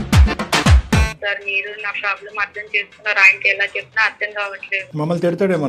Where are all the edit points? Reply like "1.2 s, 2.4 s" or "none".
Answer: 1.1 s, 4.8 s